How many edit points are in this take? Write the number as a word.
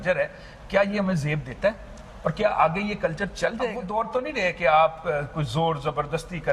one